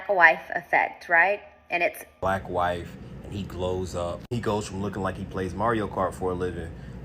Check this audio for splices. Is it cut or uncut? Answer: cut